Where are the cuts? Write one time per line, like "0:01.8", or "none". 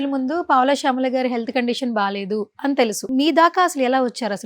0:03.1